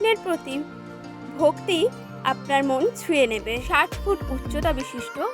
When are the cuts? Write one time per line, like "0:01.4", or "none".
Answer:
0:03.6